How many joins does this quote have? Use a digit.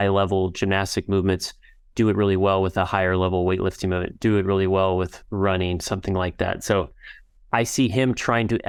0